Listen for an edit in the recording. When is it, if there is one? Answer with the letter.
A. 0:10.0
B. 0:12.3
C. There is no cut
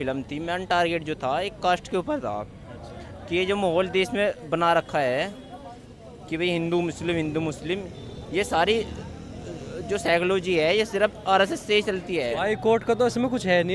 B